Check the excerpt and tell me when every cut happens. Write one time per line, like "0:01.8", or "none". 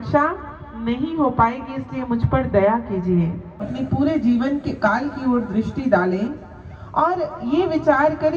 0:03.7